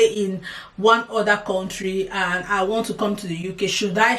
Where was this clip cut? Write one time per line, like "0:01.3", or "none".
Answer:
none